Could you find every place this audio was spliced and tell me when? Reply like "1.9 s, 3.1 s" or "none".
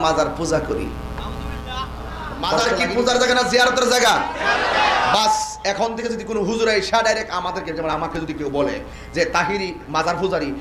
2.6 s